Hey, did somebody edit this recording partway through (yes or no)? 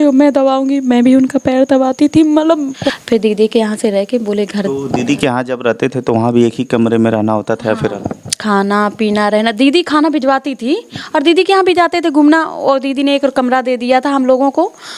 yes